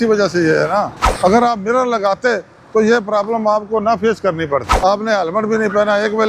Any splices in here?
yes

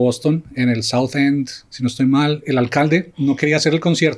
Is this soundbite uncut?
no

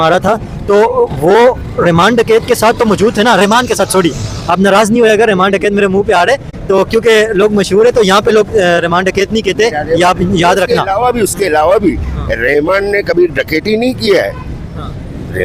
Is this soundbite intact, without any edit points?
yes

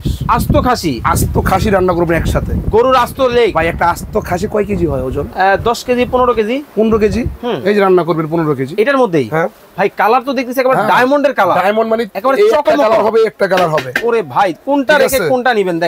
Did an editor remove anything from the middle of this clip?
no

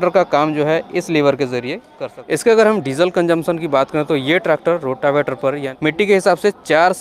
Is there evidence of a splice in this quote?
yes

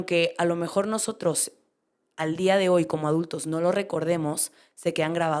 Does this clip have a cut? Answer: no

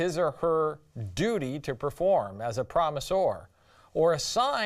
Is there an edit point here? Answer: yes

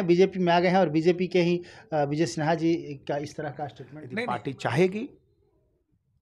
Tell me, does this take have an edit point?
yes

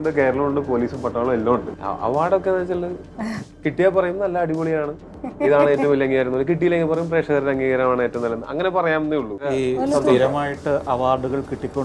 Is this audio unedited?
no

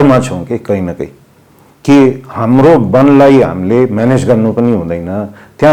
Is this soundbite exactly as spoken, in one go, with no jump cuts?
yes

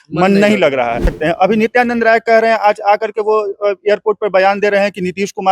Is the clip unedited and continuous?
no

